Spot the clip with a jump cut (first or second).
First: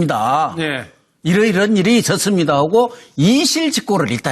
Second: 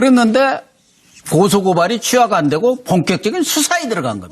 second